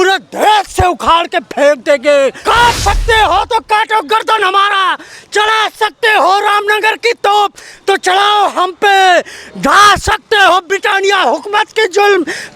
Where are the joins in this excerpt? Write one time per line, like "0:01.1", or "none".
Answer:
0:02.4